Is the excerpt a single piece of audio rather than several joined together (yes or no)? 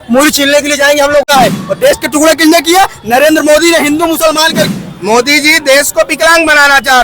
no